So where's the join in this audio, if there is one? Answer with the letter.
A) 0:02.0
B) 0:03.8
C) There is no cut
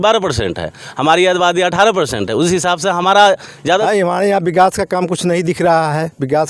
B